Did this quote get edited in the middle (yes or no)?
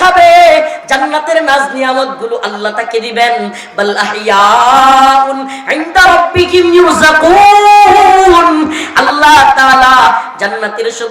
no